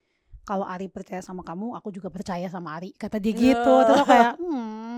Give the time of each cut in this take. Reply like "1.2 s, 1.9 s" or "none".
none